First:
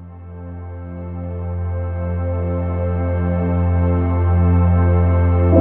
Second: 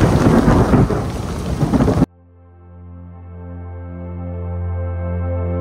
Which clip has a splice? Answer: second; 1 cut; at 2.0 s

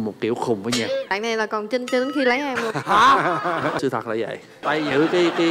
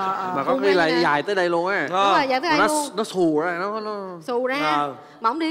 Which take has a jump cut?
first; 3 cuts; at 1.1 s, 3.8 s, 4.6 s

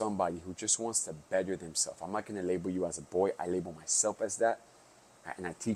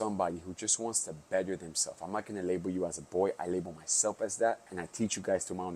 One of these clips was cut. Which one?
second; 1 cut; at 4.8 s

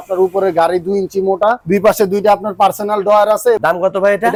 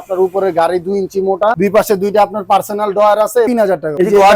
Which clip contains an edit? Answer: second; 2 cuts; at 1.6 s, 3.5 s

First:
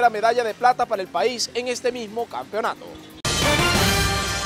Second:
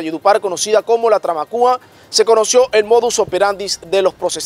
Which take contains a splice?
first; 1 cut; at 3.1 s

